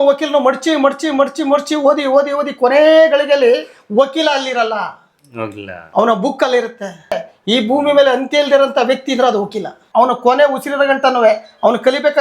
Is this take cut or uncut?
cut